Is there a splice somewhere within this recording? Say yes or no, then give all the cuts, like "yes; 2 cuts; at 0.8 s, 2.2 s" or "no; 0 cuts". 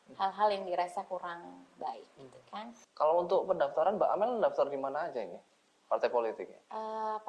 yes; 1 cut; at 2.8 s